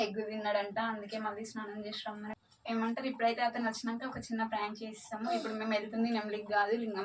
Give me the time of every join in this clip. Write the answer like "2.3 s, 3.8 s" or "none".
2.3 s